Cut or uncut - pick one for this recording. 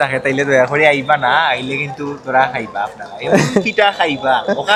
uncut